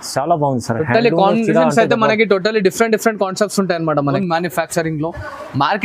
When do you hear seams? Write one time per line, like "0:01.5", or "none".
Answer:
0:04.1